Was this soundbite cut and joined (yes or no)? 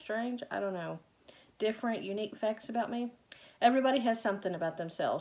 no